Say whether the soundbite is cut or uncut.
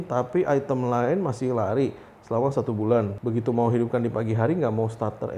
cut